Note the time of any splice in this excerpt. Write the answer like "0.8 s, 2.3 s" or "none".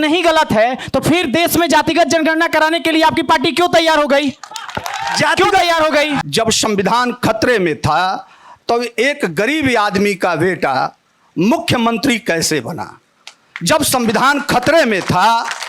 6.2 s

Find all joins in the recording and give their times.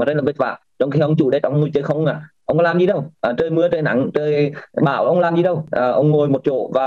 5.6 s

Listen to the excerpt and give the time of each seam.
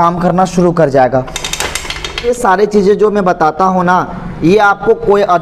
2.3 s

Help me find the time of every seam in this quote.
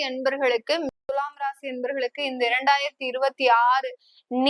1.0 s

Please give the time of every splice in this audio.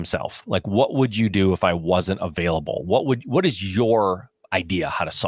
4.3 s

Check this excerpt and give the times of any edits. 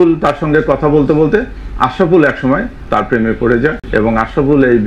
3.8 s

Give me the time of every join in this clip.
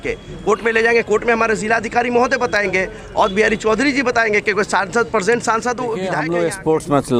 6.1 s

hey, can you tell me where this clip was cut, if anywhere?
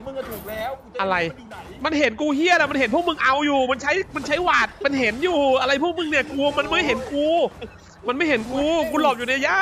none

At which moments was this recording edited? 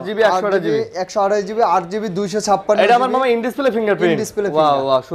none

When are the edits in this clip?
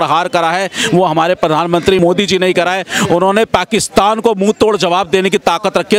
2.0 s

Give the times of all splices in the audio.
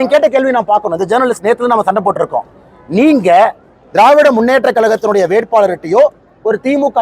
none

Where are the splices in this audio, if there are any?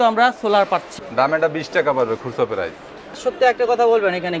1.0 s, 3.2 s

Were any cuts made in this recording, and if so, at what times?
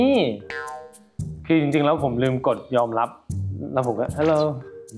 3.2 s

